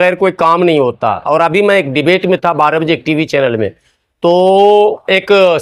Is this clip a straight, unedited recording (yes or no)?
yes